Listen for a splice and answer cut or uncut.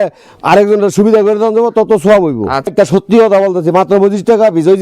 cut